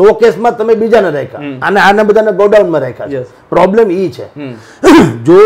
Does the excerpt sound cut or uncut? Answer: uncut